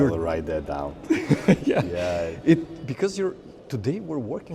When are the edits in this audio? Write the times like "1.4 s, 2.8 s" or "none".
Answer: none